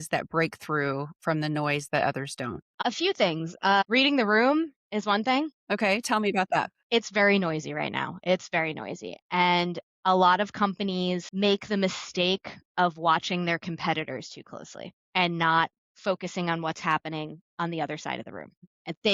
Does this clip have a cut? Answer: yes; 2 cuts; at 2.7 s, 5.6 s

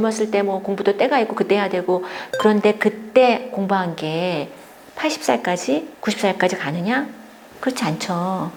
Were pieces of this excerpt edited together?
no; 0 cuts

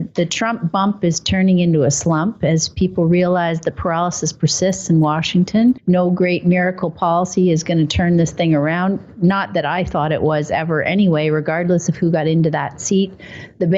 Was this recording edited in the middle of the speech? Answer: yes; 1 cut; at 11.6 s

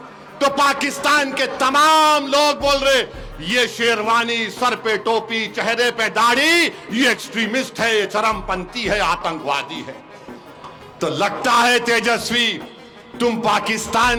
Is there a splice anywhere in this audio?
no; 0 cuts

